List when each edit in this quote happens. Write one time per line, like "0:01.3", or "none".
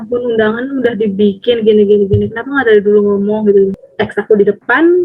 0:03.8